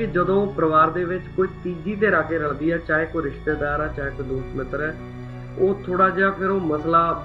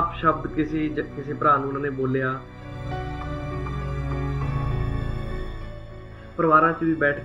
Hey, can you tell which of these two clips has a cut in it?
second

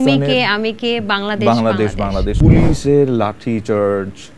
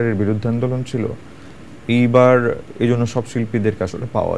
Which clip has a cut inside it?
first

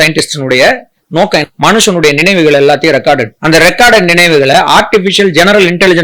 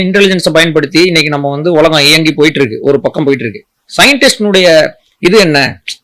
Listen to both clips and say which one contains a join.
first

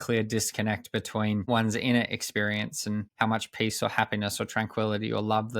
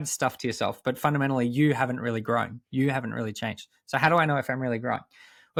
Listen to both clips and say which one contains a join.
first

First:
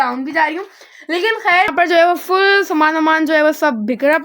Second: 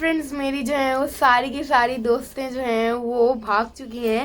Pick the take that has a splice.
first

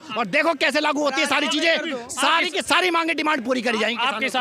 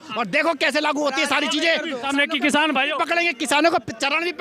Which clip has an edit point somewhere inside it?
second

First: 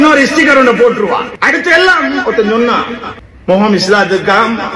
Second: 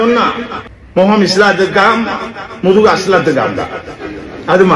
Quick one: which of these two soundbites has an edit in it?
first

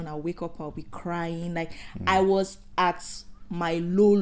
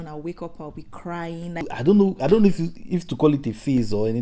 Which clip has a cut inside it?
second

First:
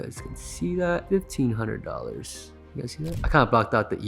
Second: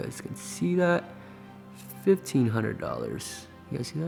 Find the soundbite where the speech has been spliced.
first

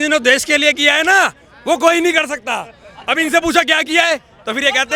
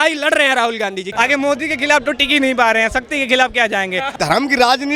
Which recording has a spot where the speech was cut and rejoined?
second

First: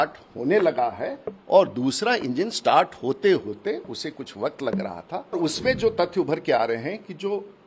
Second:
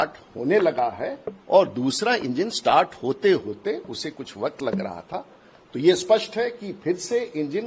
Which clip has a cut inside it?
first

